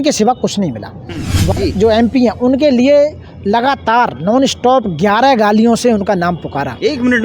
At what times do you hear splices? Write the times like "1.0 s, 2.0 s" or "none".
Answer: 1.5 s

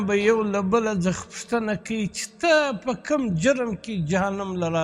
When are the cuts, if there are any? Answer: none

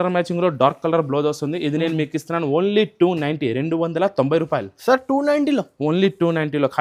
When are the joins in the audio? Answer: none

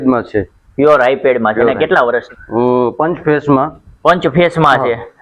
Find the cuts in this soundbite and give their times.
2.3 s

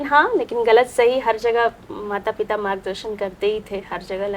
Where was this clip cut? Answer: none

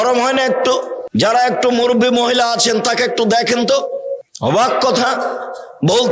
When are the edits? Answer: 1.0 s, 4.2 s

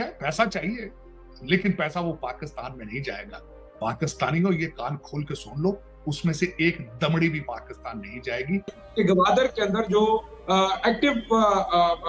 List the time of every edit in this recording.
8.8 s

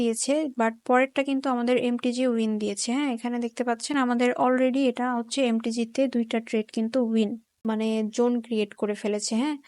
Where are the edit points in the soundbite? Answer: 7.5 s

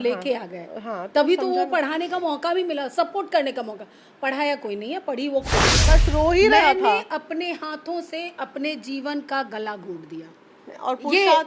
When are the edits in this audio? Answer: 5.7 s

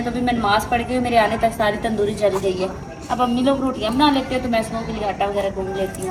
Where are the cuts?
none

